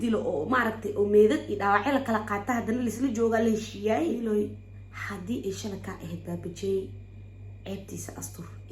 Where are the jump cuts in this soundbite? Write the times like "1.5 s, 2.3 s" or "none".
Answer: 4.2 s